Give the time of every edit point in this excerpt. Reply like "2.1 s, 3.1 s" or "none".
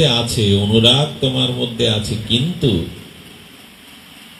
none